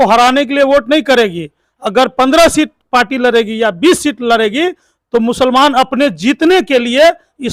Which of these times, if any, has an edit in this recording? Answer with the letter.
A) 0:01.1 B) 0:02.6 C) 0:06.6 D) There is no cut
D